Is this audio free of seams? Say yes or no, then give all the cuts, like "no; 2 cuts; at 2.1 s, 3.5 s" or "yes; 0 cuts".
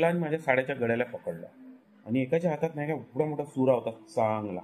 yes; 0 cuts